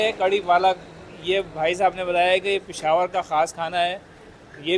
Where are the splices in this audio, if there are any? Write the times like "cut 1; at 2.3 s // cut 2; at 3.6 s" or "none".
none